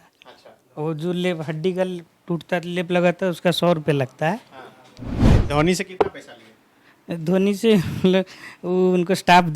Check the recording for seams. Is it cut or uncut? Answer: cut